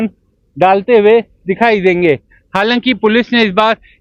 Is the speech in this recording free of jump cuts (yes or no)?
yes